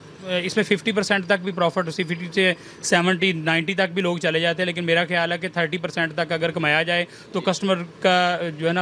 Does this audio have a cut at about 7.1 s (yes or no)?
no